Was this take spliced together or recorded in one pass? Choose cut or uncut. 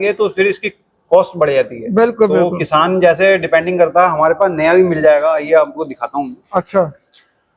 uncut